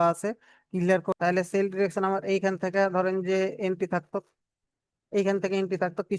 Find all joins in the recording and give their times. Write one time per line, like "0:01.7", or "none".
0:01.1